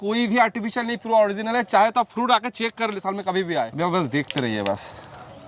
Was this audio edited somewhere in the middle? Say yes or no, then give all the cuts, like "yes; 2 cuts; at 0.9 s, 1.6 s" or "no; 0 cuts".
no; 0 cuts